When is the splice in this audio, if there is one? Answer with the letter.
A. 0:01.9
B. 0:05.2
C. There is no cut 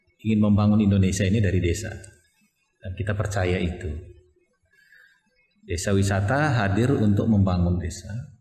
A